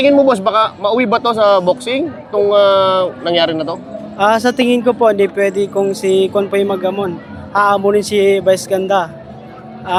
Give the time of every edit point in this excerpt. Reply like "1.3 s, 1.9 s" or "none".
none